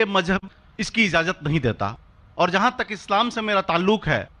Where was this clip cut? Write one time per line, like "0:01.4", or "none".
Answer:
none